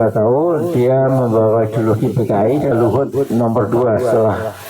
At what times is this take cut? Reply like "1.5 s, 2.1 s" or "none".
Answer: 2.7 s